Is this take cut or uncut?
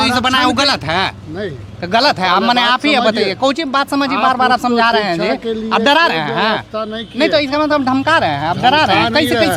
uncut